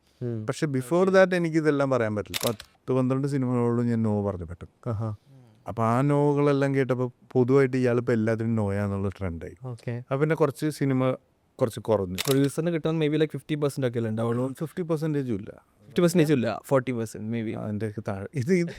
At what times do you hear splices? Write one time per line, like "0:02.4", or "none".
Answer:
0:02.3
0:12.2